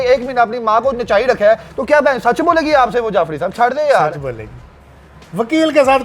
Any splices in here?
no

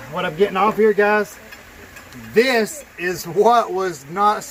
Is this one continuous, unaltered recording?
yes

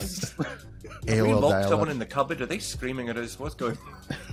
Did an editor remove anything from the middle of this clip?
no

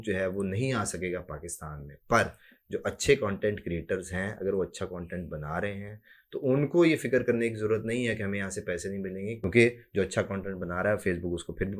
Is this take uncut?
no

